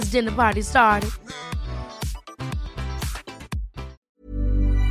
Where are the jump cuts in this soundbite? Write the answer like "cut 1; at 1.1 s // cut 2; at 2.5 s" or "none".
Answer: cut 1; at 4.0 s